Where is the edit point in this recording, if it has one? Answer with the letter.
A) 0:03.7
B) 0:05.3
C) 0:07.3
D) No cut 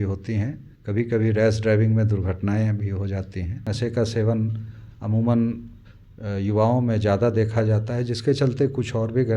A